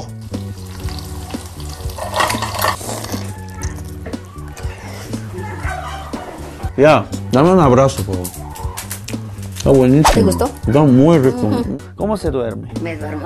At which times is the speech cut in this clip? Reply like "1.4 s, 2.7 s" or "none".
2.8 s, 11.6 s